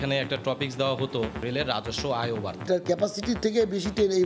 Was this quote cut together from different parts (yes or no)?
yes